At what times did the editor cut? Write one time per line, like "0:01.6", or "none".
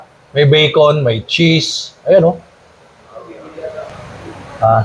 0:03.6

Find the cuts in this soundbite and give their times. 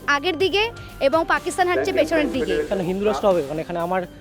0:02.7

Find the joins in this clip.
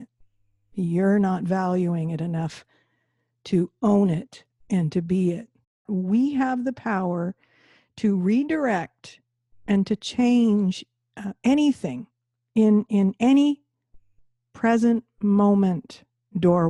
0:05.8

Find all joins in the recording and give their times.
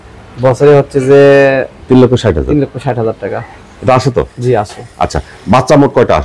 none

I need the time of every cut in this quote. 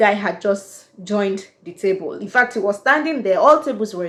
none

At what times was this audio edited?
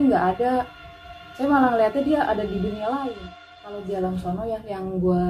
0:03.1

